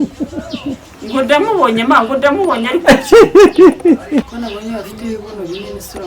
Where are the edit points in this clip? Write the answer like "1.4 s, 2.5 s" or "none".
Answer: 4.3 s